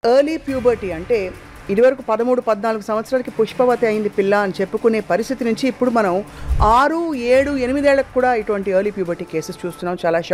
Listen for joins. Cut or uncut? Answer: uncut